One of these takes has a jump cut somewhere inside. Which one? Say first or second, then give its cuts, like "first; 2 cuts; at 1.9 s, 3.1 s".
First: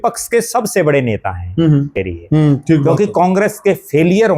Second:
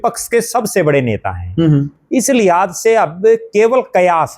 first; 1 cut; at 2.0 s